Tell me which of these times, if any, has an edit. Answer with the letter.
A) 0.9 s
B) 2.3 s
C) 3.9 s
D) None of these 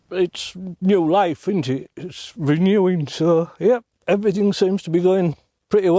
C